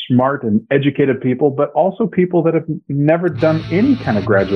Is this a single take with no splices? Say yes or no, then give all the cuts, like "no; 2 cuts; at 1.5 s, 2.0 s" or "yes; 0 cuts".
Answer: no; 1 cut; at 3.6 s